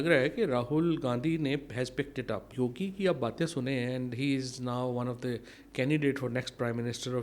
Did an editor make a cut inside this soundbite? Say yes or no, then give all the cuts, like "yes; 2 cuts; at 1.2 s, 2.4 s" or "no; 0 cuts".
yes; 1 cut; at 2.5 s